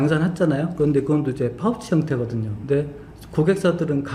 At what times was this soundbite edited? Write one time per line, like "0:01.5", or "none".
none